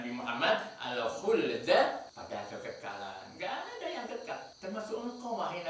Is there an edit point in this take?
yes; 2 cuts; at 2.1 s, 4.5 s

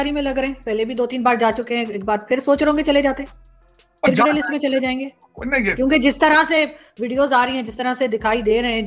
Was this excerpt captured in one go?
yes; 0 cuts

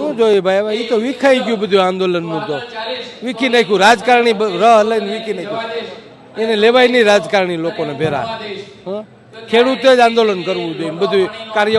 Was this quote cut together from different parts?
no; 0 cuts

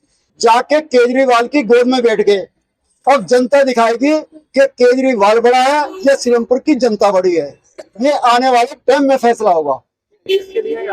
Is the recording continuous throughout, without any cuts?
yes; 0 cuts

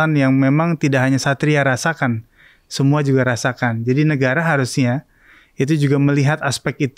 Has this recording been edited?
no; 0 cuts

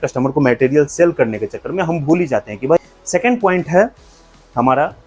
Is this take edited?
yes; 1 cut; at 2.8 s

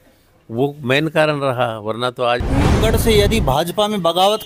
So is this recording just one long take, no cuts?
no; 1 cut; at 2.8 s

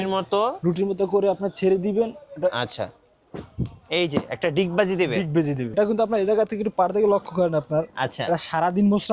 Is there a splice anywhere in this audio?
yes; 1 cut; at 5.7 s

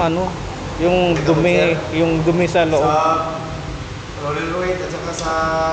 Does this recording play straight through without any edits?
yes; 0 cuts

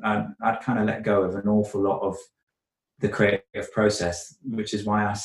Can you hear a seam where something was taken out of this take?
no; 0 cuts

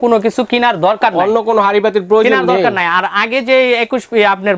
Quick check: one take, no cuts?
yes; 0 cuts

